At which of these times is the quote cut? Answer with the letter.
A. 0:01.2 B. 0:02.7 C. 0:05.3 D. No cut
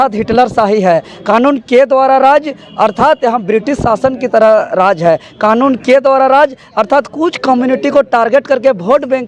D